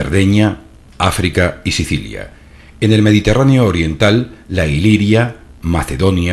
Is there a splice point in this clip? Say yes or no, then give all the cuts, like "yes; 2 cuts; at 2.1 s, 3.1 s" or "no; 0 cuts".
yes; 1 cut; at 3.0 s